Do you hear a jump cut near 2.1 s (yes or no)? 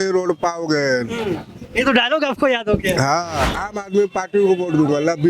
no